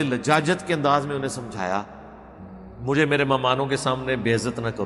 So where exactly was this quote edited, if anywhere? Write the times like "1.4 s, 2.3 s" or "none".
none